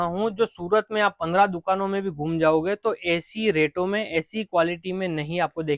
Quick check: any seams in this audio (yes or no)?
no